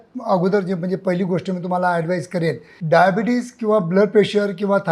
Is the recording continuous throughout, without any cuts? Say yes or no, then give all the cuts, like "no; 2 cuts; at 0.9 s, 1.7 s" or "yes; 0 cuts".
no; 1 cut; at 2.7 s